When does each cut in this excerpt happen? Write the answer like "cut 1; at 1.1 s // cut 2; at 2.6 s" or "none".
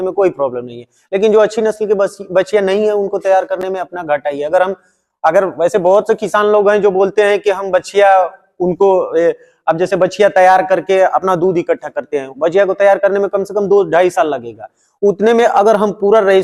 none

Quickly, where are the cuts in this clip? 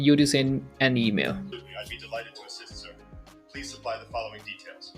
cut 1; at 1.5 s

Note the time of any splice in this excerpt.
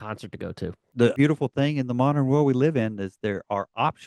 cut 1; at 1.2 s

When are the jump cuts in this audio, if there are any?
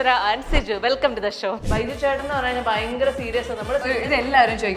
cut 1; at 1.6 s // cut 2; at 3.8 s

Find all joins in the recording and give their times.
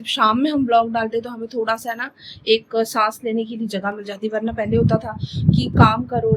none

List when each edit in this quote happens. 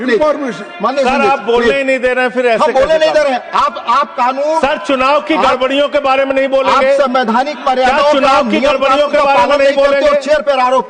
none

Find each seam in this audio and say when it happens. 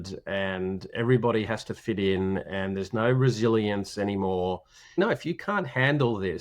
cut 1; at 4.7 s

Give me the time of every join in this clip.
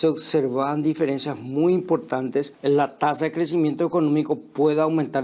cut 1; at 2.5 s

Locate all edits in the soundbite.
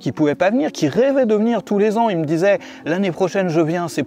none

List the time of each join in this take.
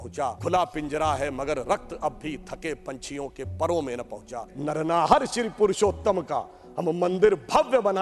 cut 1; at 4.5 s

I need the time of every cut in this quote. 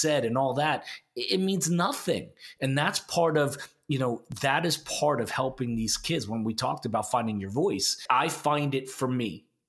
cut 1; at 7.9 s

